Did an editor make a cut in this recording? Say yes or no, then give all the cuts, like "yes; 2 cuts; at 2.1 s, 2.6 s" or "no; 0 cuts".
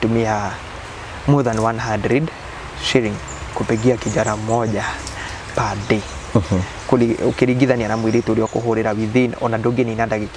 no; 0 cuts